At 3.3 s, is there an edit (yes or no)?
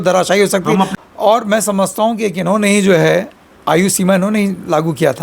no